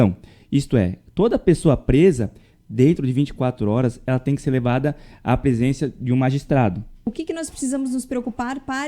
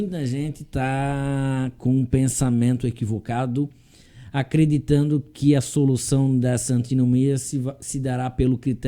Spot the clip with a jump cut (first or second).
first